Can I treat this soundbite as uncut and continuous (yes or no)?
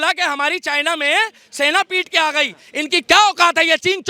yes